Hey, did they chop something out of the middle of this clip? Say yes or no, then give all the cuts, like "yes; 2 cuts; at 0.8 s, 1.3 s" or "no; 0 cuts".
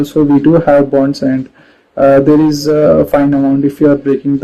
no; 0 cuts